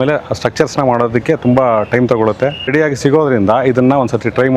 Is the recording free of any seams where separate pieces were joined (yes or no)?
no